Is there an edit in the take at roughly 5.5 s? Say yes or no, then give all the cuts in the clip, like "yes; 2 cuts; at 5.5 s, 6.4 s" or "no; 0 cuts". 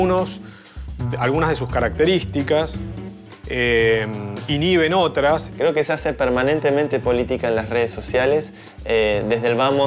yes; 1 cut; at 5.5 s